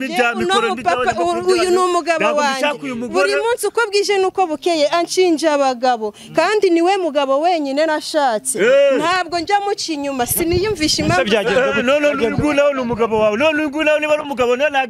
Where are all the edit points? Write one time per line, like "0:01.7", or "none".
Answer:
none